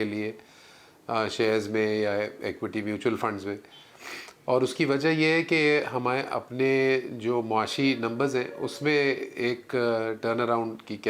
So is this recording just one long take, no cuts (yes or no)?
yes